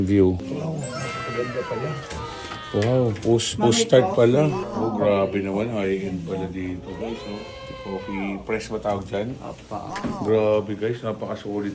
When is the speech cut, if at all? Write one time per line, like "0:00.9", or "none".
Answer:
0:10.0